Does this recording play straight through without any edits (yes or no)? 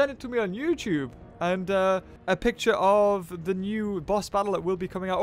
no